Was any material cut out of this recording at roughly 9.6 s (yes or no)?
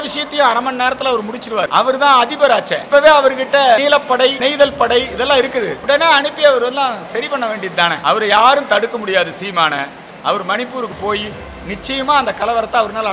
no